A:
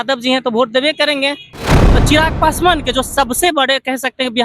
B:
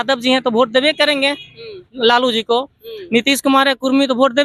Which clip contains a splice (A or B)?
A